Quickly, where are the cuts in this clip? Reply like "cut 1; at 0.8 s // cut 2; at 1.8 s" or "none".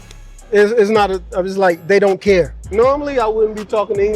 cut 1; at 2.7 s